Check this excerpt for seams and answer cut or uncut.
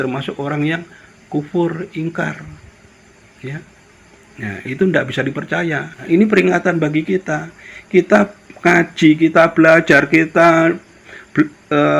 cut